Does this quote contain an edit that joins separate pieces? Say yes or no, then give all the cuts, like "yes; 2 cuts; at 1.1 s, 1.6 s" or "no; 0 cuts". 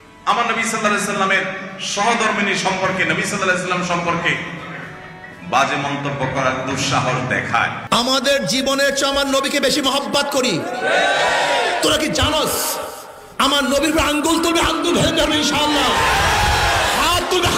yes; 1 cut; at 7.8 s